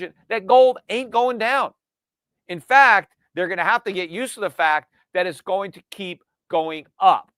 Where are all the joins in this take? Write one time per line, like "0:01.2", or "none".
none